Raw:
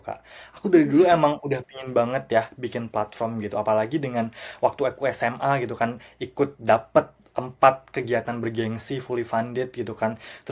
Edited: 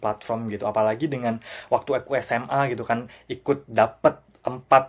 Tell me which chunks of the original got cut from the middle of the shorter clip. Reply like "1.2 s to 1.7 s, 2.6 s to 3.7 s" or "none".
none